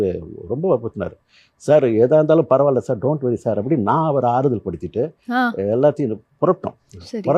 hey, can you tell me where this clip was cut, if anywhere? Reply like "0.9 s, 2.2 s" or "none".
none